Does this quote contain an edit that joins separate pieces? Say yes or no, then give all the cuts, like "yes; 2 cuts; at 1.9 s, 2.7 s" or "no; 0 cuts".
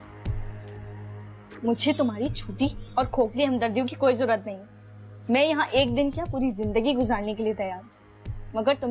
yes; 1 cut; at 1.6 s